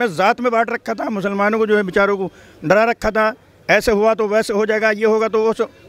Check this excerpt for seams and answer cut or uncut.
uncut